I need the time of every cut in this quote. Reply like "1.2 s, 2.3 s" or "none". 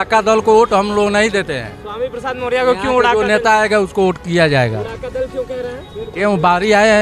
none